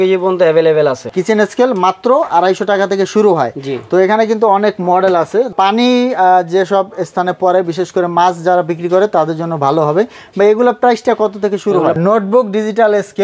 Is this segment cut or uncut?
cut